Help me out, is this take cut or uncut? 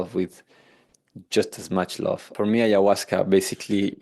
cut